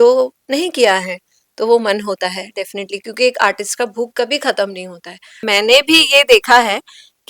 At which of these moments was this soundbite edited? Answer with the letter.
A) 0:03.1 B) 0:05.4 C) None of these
B